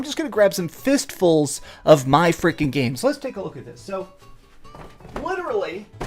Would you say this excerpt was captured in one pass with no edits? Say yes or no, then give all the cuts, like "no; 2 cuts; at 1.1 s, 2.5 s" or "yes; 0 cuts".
no; 1 cut; at 4.3 s